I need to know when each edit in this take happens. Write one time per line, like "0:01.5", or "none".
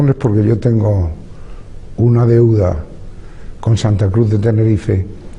0:02.3